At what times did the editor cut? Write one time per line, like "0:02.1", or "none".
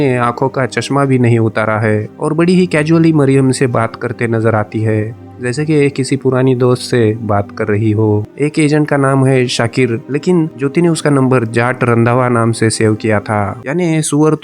0:08.3
0:13.6